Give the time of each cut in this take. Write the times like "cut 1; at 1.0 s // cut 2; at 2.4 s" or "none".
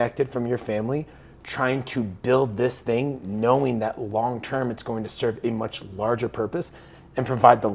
none